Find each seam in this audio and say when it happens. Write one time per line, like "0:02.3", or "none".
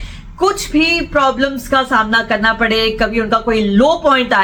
none